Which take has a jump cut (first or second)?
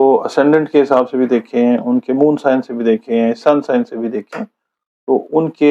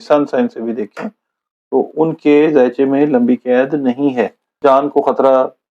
second